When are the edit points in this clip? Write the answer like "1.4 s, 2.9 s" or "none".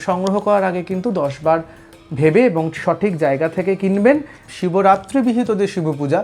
4.4 s